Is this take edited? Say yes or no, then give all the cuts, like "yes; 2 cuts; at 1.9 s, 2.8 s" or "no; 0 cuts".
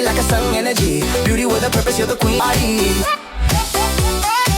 yes; 1 cut; at 2.4 s